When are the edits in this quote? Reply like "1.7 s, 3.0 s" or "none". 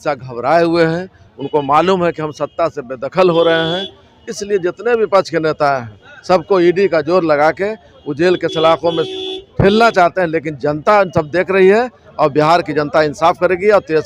none